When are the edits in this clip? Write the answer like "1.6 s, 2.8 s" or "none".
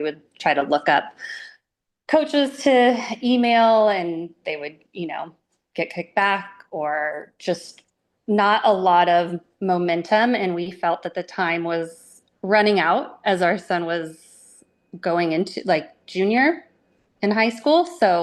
none

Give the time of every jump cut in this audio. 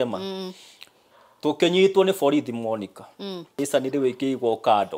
3.5 s

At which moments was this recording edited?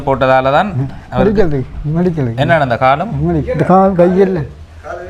none

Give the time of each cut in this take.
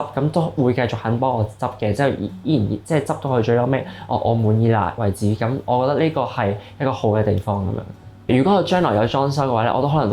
8.3 s

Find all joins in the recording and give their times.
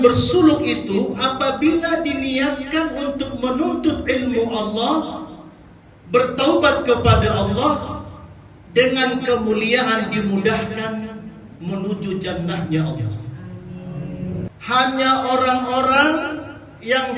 14.5 s

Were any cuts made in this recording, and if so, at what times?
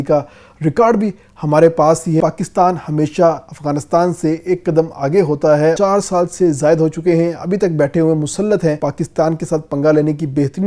2.2 s, 5.8 s, 8.8 s

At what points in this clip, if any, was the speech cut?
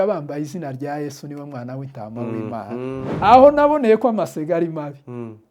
3.1 s

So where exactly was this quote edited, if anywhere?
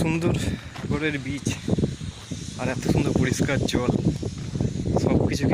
0.9 s

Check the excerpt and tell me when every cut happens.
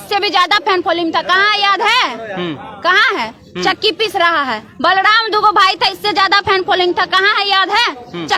none

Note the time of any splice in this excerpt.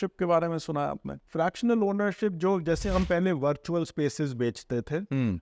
1.1 s

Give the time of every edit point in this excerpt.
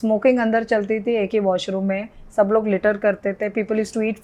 none

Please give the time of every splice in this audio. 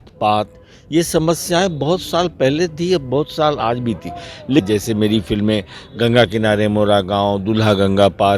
4.6 s

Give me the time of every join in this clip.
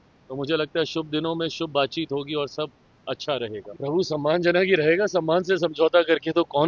3.7 s

